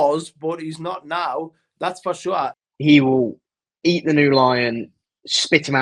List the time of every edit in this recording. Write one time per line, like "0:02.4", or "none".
0:02.6